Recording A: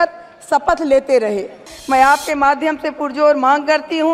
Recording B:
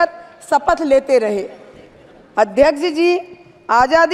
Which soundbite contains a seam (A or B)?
A